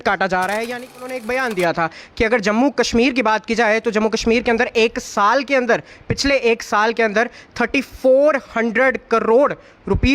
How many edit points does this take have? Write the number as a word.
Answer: one